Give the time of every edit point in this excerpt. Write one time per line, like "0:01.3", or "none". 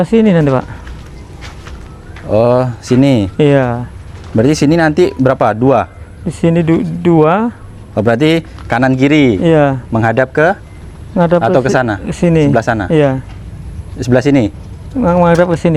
none